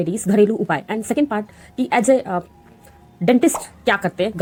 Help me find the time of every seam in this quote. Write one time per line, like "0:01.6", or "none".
none